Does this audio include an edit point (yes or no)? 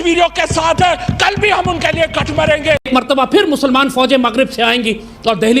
yes